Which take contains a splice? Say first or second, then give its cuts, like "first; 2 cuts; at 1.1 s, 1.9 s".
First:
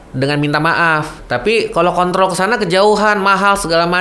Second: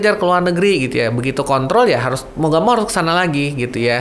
first; 1 cut; at 1.2 s